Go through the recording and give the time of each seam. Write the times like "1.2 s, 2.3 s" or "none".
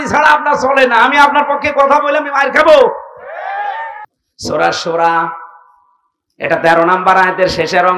4.1 s